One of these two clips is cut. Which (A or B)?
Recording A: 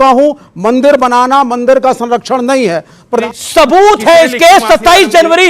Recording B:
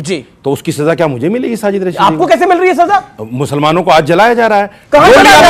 A